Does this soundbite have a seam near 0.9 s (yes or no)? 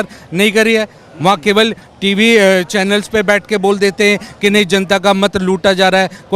no